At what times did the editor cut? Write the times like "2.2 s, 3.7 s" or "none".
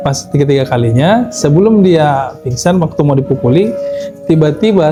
none